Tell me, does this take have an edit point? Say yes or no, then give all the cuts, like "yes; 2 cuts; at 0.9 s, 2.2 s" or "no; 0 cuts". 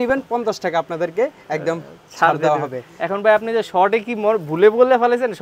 no; 0 cuts